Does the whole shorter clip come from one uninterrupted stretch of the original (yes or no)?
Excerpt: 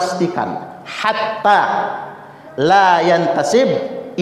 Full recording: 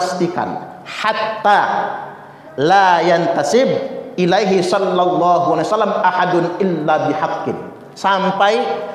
yes